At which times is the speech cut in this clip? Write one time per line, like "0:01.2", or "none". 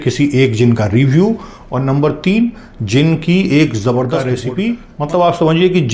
0:04.3

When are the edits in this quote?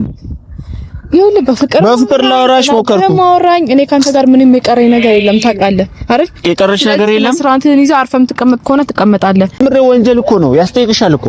0:09.6

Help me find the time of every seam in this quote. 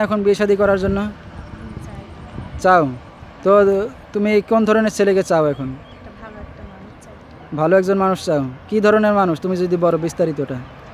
none

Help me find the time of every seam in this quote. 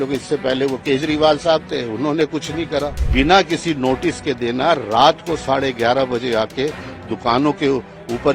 0:03.0

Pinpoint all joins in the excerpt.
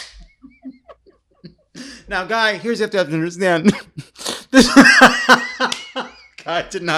none

